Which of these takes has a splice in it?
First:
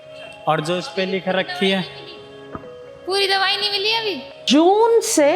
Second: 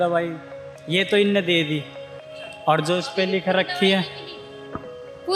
first; 1 cut; at 4.3 s

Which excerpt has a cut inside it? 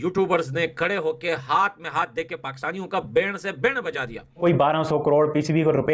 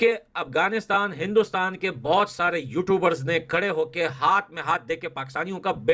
first; 1 cut; at 4.4 s

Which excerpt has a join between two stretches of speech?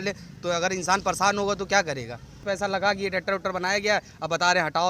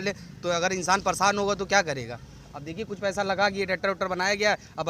first; 1 cut; at 2.3 s

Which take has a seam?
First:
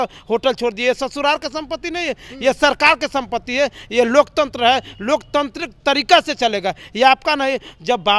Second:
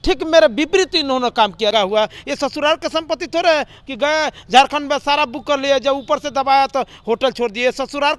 second; 1 cut; at 1.7 s

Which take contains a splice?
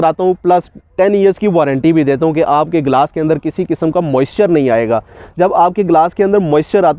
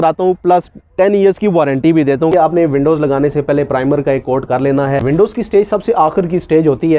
second; 2 cuts; at 2.3 s, 5.0 s

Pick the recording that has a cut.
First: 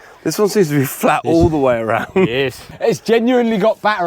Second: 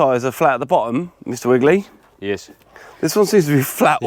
first; 1 cut; at 2.7 s

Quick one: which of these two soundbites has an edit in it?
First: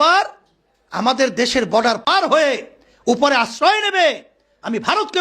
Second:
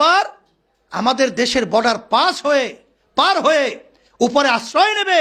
first; 1 cut; at 2.1 s

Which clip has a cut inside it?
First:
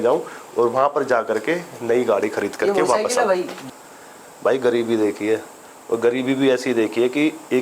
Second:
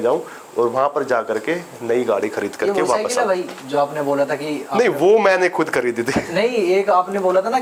first; 1 cut; at 3.6 s

